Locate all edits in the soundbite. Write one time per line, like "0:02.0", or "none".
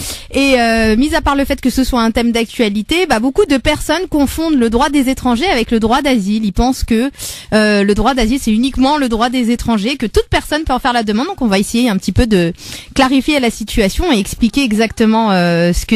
0:06.7